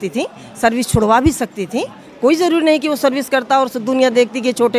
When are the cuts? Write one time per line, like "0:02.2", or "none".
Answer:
none